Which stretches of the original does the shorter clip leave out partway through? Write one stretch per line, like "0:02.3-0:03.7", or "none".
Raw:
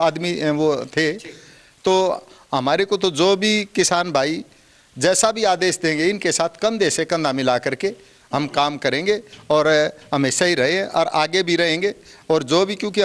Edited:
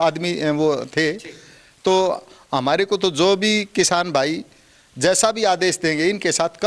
none